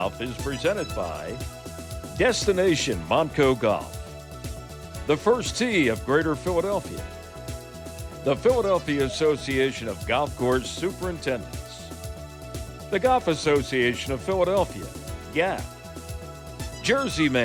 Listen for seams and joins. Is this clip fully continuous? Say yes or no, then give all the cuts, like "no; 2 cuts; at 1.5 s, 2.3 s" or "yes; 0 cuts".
yes; 0 cuts